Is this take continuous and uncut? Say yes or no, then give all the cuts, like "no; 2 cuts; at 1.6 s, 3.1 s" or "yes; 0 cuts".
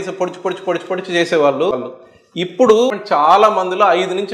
no; 2 cuts; at 1.9 s, 2.9 s